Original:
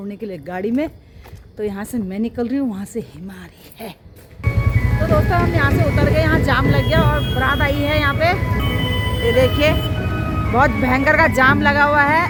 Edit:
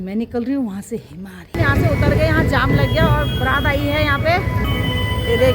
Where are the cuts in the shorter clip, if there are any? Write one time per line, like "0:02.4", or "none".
0:01.5